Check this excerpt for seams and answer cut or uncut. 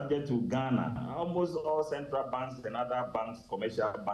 uncut